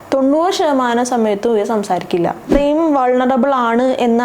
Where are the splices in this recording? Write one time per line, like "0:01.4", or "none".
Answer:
0:02.5